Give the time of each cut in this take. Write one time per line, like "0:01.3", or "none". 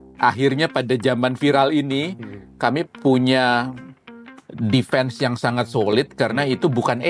none